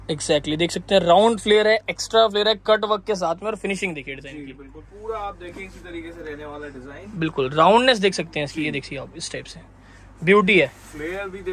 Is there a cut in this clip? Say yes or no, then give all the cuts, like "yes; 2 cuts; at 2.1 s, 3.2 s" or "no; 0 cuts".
no; 0 cuts